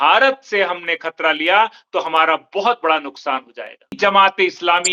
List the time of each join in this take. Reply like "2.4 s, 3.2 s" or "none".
3.9 s